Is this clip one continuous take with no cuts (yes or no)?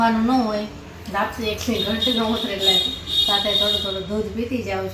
yes